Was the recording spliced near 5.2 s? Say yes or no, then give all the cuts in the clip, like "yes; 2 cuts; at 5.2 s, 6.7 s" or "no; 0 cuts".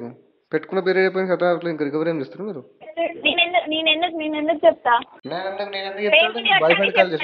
yes; 1 cut; at 5.2 s